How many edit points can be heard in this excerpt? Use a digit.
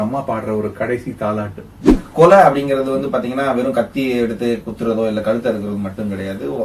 1